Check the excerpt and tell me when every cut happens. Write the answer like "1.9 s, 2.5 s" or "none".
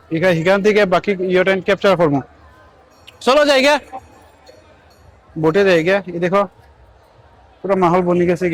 none

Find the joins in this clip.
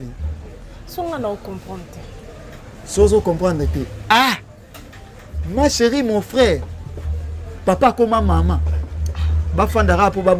none

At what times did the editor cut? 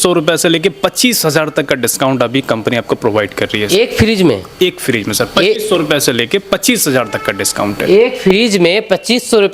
none

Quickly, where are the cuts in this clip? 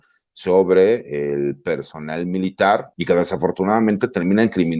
2.9 s

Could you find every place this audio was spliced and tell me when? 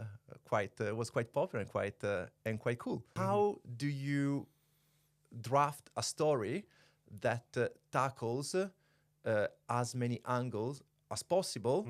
3.1 s

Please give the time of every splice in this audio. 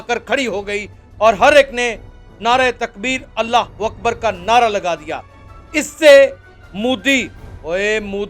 none

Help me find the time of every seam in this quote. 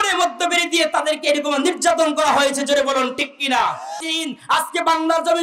4.1 s

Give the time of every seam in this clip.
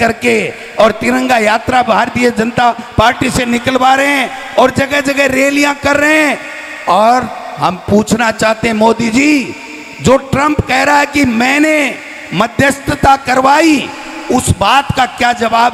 none

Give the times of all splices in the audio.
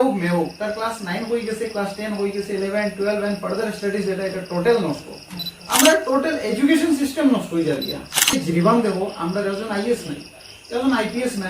8.3 s

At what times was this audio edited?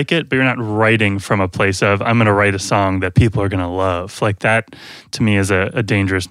none

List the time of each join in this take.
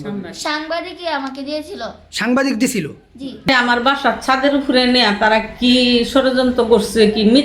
3.5 s

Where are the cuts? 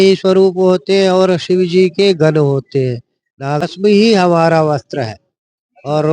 3.6 s

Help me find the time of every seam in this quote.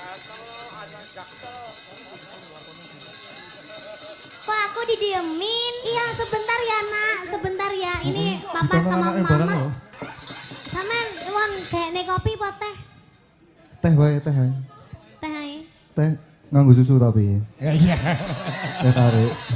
10.0 s

